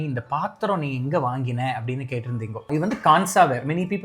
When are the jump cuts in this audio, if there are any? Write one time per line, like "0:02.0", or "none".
0:02.7